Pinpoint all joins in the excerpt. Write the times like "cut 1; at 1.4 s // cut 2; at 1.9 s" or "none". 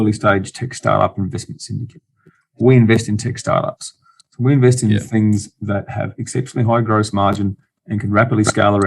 cut 1; at 2.6 s